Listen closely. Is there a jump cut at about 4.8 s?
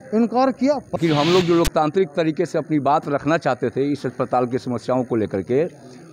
no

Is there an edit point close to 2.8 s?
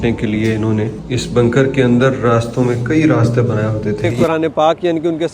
no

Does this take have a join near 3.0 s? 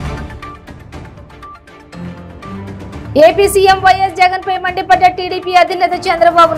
yes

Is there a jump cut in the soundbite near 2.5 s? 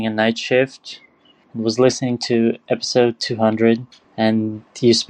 no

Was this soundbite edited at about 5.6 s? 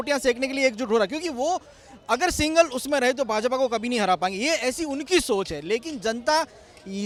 no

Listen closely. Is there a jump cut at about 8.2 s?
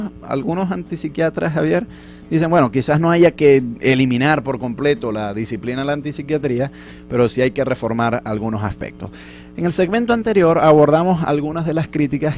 yes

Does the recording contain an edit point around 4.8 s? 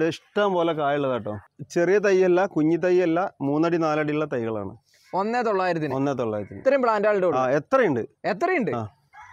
no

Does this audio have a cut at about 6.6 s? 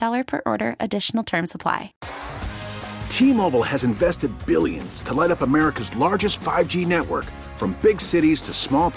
no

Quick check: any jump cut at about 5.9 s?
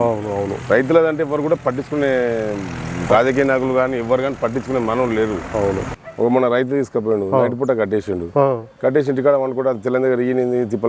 yes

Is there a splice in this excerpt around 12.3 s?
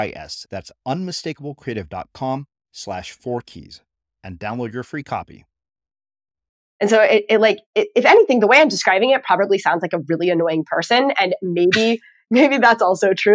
no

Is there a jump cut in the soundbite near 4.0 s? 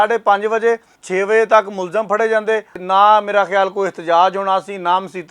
no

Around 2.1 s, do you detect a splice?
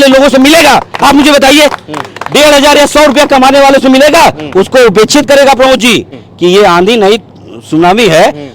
no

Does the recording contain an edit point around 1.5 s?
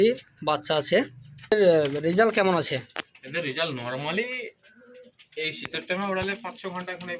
yes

